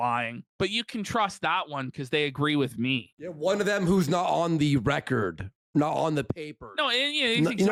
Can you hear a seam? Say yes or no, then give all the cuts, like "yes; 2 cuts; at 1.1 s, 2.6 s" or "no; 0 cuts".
no; 0 cuts